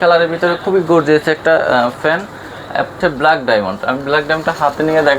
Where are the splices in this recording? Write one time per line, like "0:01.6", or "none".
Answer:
0:03.0

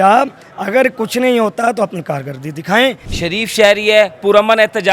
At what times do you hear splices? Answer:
0:03.1

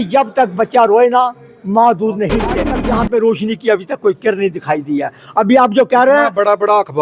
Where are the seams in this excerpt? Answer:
0:02.7

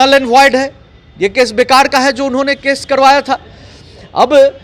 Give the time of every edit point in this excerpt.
none

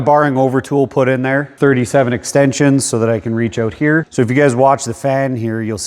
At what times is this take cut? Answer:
0:01.5
0:04.1

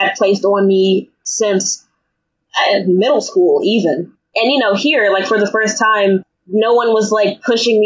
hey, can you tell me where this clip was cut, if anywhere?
0:01.2
0:04.2

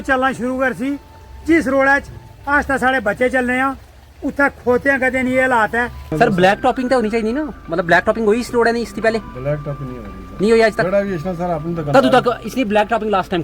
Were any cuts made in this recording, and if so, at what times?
0:06.1

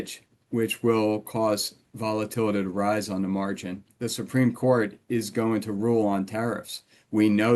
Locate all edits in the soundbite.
0:03.9

